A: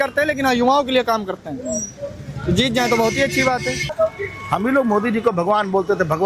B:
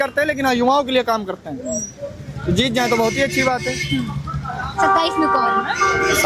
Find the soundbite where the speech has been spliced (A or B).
A